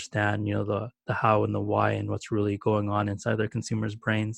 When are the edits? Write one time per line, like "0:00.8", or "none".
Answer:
none